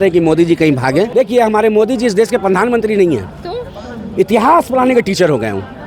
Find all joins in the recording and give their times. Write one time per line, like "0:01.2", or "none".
0:01.1

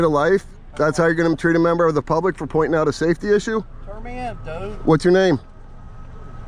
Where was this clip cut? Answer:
none

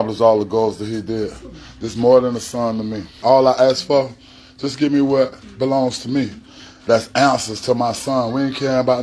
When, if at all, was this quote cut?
0:03.1

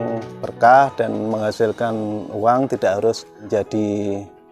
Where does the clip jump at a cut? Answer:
0:03.4

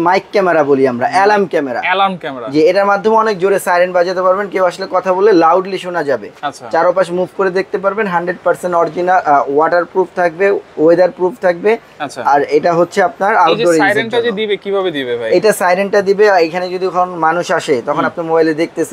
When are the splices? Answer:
none

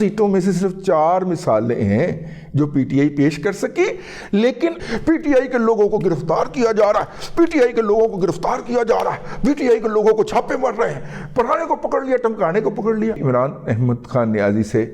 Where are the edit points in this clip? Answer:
0:04.8
0:13.2

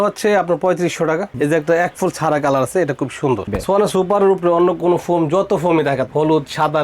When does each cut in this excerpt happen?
0:01.3
0:03.5

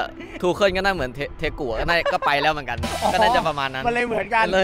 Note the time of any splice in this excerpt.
none

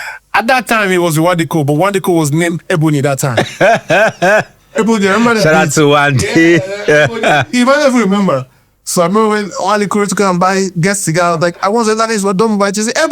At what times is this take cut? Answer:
none

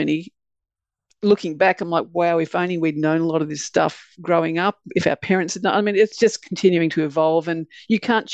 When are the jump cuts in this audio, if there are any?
0:06.1

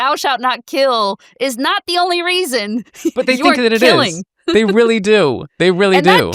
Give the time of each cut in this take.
none

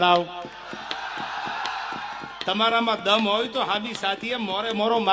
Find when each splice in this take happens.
none

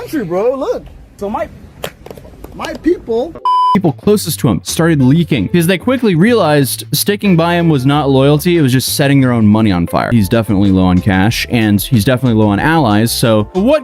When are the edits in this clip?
0:03.7
0:10.1

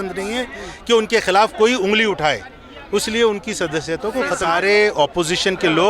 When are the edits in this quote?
0:04.4

